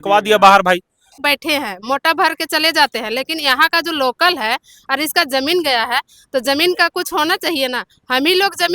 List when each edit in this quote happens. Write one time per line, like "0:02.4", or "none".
0:01.2